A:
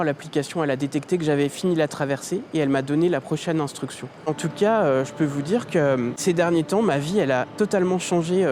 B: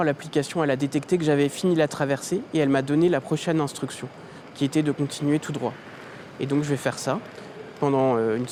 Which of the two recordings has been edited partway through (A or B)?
A